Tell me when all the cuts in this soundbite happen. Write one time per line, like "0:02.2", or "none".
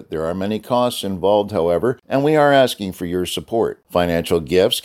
0:02.0